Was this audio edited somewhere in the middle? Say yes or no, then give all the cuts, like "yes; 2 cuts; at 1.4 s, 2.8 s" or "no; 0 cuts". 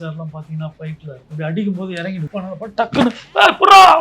yes; 2 cuts; at 1.2 s, 2.3 s